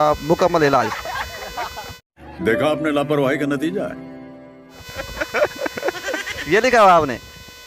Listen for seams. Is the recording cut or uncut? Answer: uncut